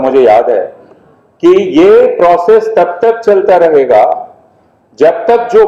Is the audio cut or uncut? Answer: uncut